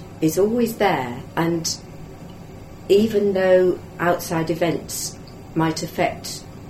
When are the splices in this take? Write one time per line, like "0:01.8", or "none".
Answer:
0:01.2
0:03.9

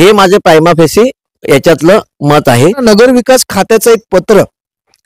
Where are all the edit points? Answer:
0:02.8

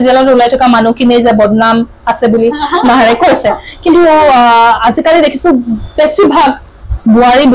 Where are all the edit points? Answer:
none

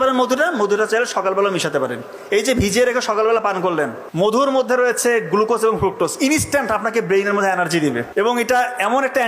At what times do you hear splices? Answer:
0:04.4
0:08.1

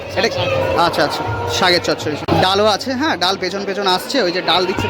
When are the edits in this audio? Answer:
0:02.2

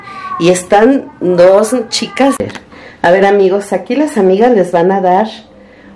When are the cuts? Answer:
0:02.5

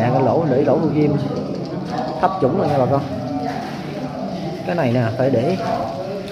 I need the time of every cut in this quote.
none

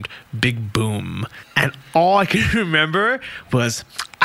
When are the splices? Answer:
0:01.4

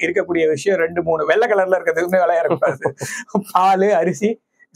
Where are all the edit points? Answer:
none

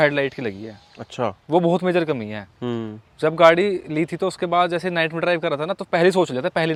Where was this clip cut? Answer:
none

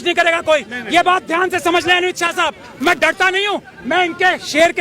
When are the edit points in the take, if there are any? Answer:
none

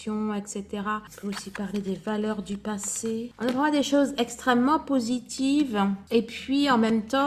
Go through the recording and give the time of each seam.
0:03.3

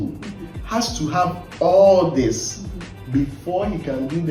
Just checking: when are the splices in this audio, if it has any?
none

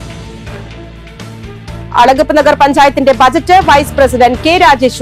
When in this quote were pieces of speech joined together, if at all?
none

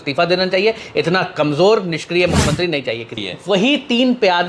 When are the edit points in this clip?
0:03.2

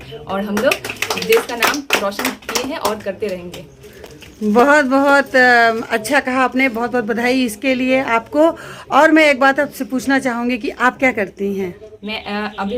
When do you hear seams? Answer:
none

